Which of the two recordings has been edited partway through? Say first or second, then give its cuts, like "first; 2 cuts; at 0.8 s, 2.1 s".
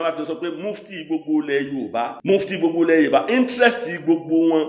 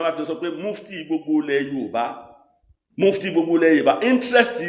first; 1 cut; at 2.2 s